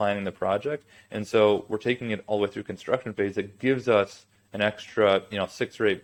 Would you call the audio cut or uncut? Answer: uncut